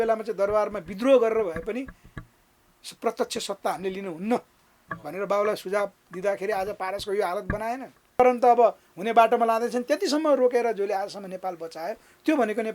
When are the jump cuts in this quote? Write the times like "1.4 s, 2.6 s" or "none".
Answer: 8.2 s